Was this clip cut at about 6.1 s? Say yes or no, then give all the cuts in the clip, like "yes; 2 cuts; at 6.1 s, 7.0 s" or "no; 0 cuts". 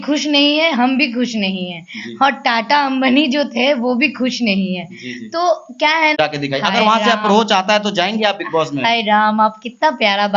yes; 1 cut; at 6.1 s